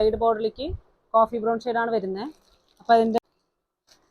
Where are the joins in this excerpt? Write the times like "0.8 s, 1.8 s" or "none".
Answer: 3.2 s